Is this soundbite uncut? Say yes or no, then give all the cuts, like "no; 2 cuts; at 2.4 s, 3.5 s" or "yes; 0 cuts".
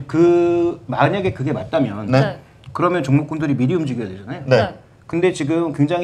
yes; 0 cuts